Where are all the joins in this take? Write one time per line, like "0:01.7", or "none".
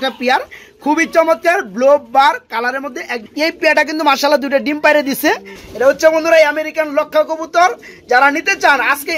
0:03.2
0:05.5